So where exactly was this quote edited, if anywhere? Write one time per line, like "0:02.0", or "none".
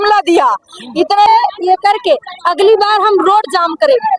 0:01.3